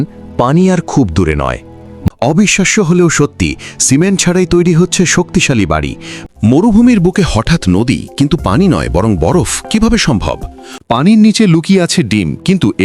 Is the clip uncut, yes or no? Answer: no